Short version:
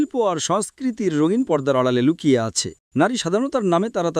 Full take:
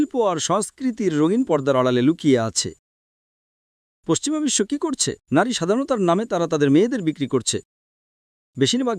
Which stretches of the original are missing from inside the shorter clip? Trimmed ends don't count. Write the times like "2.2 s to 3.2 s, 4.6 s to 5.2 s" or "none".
2.8 s to 5.1 s